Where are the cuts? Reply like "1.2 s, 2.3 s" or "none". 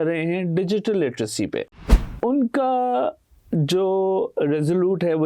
1.6 s